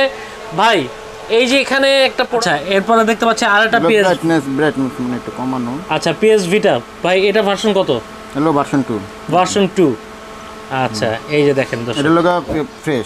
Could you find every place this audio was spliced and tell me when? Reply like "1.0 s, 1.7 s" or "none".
2.3 s